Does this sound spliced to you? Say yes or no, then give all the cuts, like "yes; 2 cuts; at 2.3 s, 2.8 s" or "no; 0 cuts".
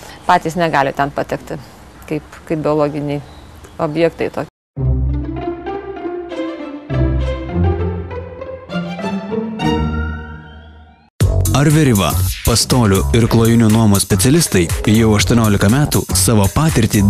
yes; 1 cut; at 4.5 s